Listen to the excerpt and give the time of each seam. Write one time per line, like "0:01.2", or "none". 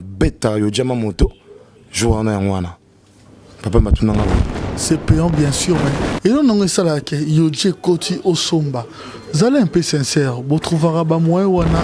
0:04.7